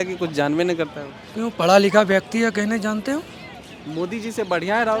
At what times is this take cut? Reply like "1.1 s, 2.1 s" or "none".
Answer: none